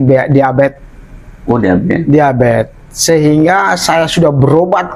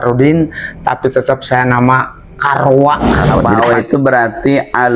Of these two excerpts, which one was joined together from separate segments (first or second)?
second